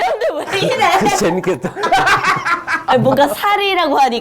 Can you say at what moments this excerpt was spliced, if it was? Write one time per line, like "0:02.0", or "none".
0:02.8